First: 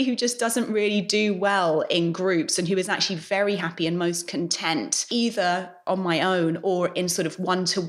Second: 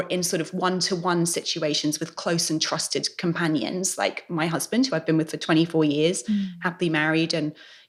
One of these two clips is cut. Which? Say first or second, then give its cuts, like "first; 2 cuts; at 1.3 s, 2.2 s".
first; 2 cuts; at 5.1 s, 5.8 s